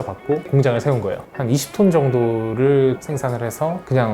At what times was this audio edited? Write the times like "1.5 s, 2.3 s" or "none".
1.2 s, 3.0 s